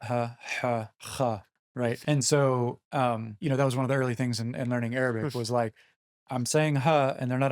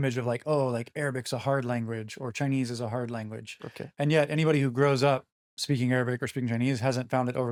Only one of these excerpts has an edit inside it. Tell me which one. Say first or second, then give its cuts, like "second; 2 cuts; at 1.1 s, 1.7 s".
first; 2 cuts; at 2.0 s, 3.3 s